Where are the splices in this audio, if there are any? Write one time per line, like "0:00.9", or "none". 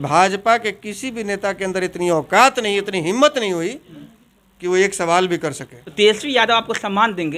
0:05.8